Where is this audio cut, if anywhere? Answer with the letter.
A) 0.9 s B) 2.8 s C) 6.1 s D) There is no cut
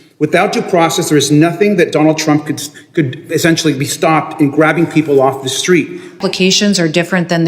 C